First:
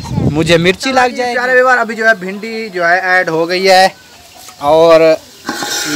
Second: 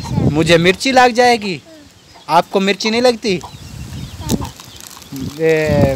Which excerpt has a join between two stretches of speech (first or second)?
first